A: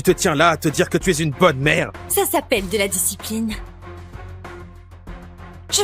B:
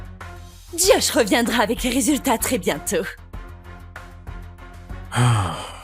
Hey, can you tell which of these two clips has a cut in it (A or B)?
B